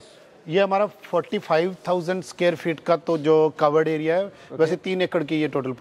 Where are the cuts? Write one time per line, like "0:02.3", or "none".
none